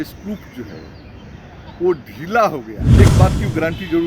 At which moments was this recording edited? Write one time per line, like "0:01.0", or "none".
0:03.0

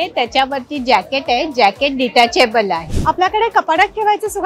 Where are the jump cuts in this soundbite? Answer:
0:02.9

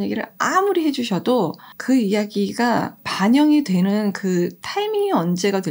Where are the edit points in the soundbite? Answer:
0:01.7
0:03.0

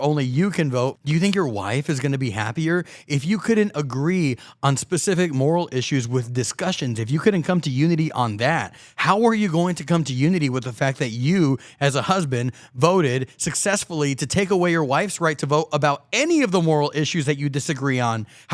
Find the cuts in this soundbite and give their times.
0:01.0

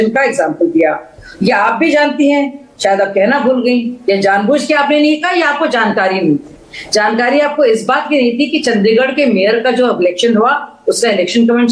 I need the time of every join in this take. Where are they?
none

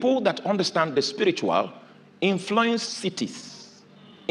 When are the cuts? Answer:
none

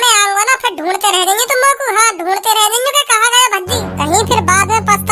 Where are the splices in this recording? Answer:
0:03.9

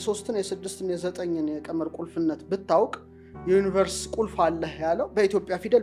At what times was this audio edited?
none

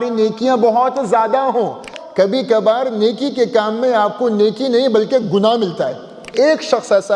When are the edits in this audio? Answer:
0:01.9
0:06.3

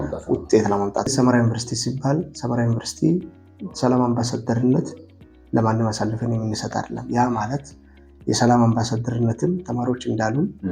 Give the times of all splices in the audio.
0:01.1

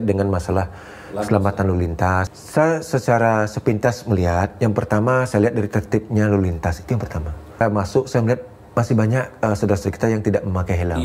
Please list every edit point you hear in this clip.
0:02.3
0:07.6

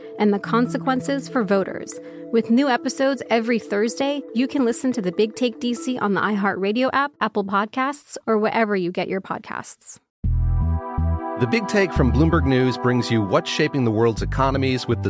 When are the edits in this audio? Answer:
0:10.0

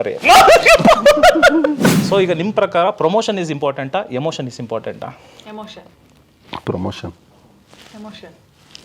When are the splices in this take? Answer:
0:01.9

